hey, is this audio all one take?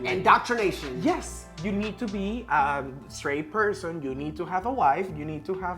yes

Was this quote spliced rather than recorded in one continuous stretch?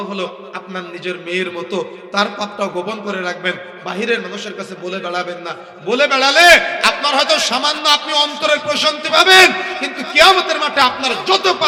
no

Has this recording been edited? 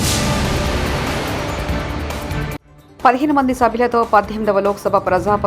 yes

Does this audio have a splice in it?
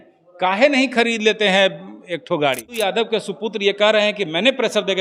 yes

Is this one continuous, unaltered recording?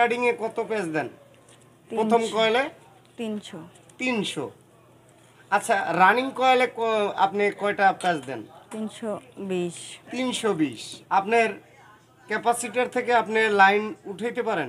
no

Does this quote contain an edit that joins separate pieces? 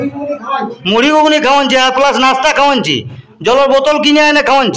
no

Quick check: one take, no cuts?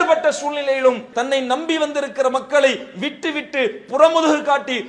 no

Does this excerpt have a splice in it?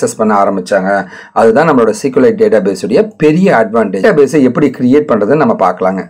yes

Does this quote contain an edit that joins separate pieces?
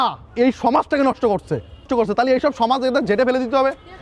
yes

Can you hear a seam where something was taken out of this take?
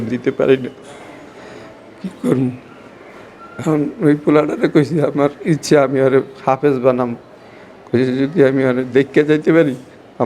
no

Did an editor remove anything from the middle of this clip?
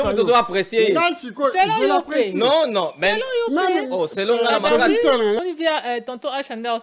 yes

